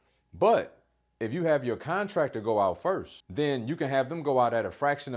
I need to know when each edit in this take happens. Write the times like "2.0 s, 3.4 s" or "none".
3.2 s